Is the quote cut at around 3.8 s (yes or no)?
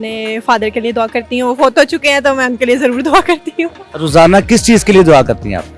yes